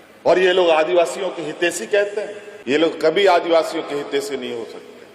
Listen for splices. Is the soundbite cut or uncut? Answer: cut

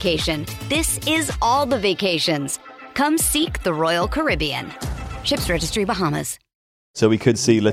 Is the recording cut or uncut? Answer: cut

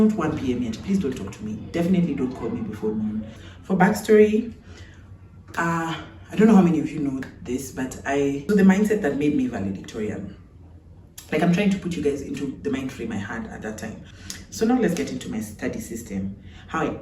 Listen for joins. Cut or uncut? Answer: cut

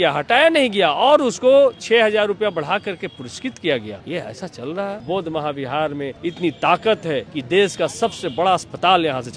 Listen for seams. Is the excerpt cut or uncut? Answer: cut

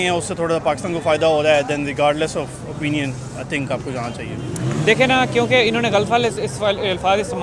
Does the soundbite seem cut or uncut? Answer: uncut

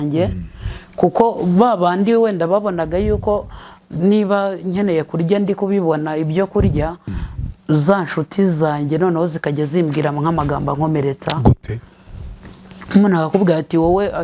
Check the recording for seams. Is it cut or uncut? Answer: uncut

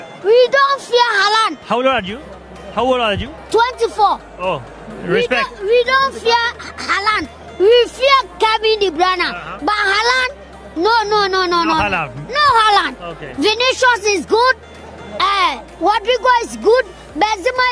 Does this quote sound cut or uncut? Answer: uncut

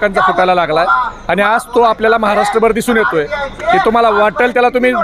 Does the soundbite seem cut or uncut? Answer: uncut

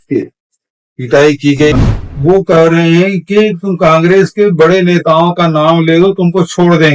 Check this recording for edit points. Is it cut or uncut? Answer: cut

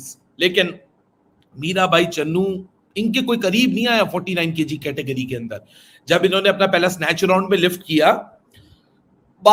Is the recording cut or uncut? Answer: uncut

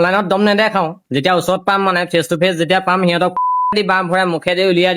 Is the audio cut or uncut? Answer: uncut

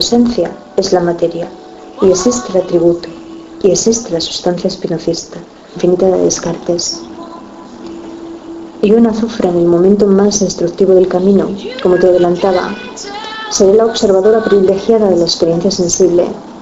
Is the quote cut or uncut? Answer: uncut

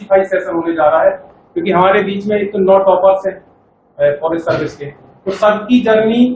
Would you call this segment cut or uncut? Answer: uncut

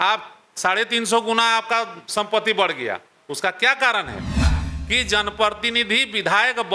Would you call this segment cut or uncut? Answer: cut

